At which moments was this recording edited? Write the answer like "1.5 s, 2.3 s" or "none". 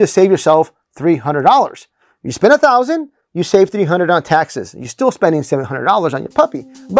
none